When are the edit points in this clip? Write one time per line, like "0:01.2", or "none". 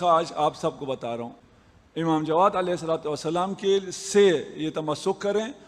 0:01.4